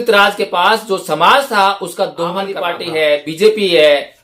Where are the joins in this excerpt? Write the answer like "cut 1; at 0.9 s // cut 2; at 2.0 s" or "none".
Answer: cut 1; at 2.7 s